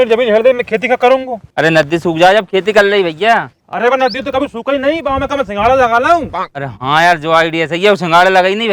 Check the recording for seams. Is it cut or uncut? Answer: uncut